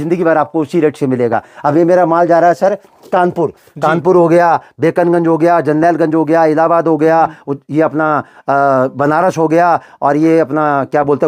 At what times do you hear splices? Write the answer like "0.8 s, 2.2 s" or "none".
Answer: none